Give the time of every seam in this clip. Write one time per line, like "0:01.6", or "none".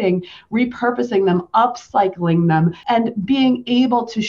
0:02.8